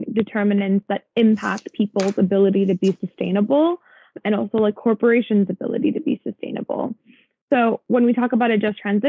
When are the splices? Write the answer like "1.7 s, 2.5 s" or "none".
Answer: 4.2 s